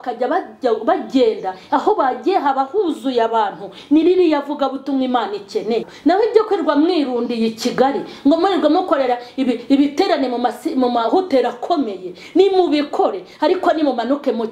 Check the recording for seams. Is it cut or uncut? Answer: cut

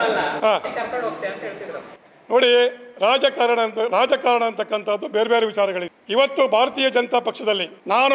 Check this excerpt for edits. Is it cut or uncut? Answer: uncut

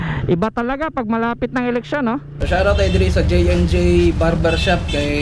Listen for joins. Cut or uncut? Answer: cut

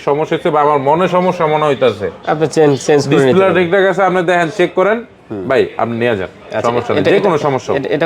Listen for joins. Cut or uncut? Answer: uncut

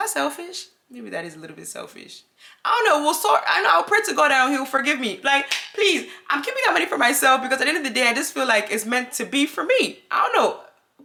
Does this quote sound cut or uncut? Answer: uncut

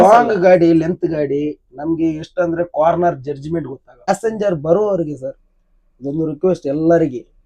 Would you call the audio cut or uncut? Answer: cut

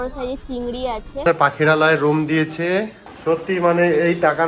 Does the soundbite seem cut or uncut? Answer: cut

